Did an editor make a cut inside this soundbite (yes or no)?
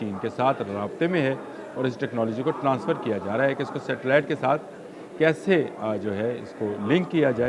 no